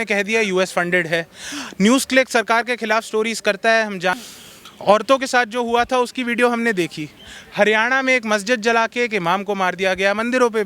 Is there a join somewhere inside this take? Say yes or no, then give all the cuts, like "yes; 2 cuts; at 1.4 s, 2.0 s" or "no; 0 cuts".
yes; 1 cut; at 4.2 s